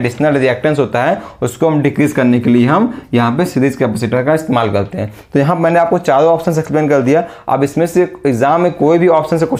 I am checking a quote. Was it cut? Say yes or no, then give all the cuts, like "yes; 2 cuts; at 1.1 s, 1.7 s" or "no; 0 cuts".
no; 0 cuts